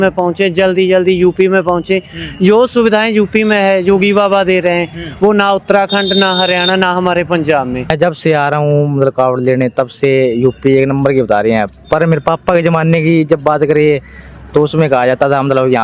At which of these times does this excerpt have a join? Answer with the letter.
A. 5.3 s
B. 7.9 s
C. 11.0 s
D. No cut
B